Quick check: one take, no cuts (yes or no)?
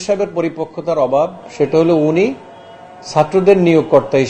yes